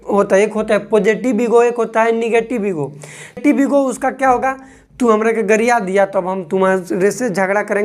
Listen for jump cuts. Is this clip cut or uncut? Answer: cut